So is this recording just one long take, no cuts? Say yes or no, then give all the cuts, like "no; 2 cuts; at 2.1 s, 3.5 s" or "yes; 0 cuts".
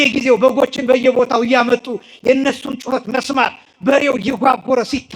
yes; 0 cuts